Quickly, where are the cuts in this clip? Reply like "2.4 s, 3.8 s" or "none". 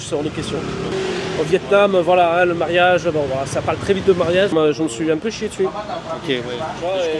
0.9 s, 4.5 s